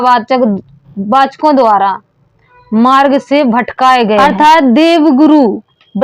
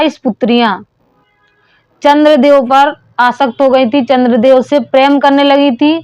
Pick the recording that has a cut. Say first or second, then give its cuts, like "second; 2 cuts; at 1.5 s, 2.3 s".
first; 1 cut; at 4.2 s